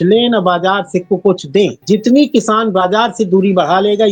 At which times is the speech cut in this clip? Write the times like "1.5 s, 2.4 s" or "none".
1.8 s